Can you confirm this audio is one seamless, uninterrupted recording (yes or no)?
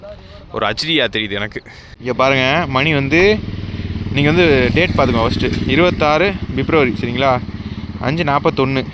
no